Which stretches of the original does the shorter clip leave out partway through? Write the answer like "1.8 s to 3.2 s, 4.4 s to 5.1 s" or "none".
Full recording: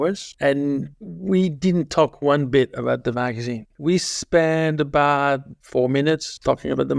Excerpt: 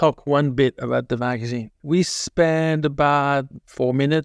none